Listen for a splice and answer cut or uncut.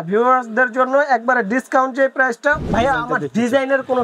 cut